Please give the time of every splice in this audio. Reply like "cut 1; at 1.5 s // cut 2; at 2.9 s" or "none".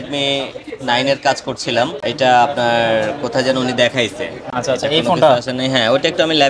none